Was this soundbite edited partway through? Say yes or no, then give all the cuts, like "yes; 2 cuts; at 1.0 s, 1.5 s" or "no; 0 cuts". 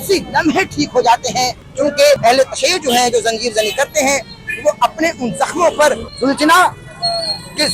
yes; 2 cuts; at 1.9 s, 6.1 s